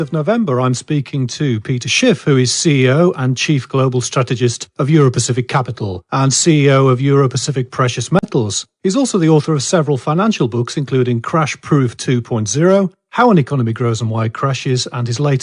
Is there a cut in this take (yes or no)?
yes